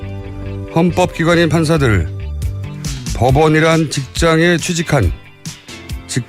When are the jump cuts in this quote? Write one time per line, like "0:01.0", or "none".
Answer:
0:04.0